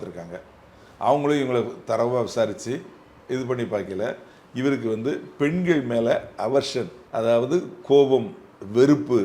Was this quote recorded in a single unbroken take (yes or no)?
no